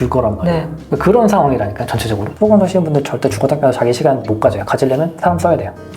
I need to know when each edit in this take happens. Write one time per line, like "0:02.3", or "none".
0:02.3